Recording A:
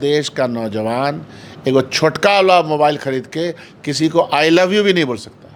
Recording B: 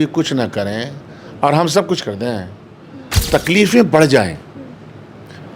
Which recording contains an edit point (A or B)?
B